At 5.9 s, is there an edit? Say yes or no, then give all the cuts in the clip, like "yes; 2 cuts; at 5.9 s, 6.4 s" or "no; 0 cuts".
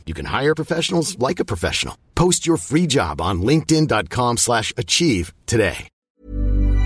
yes; 1 cut; at 5.9 s